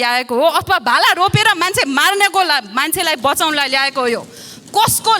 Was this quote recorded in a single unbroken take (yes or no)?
yes